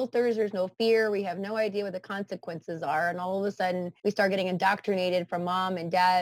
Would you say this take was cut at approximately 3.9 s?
yes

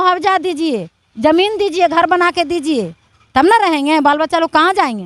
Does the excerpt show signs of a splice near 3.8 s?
no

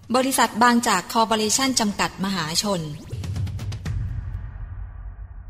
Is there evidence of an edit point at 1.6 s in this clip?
no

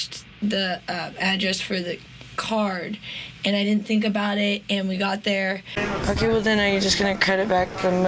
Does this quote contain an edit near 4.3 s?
no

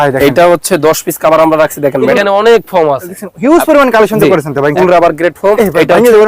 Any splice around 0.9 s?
no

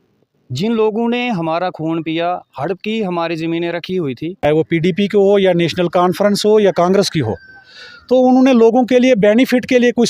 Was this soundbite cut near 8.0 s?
no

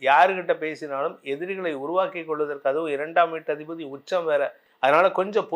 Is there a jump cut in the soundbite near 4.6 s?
yes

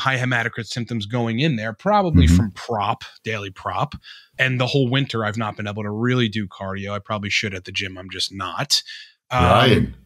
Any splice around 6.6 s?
no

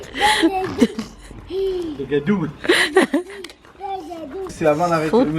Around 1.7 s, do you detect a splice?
no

